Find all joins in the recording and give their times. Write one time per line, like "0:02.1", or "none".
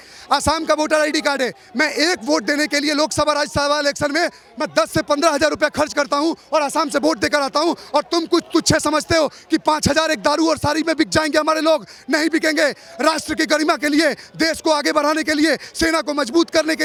none